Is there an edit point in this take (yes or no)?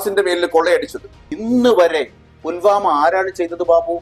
yes